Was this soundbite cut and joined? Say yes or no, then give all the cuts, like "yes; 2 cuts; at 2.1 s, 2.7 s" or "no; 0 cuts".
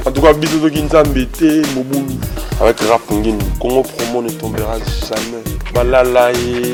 no; 0 cuts